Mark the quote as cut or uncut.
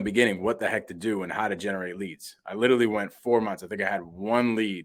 uncut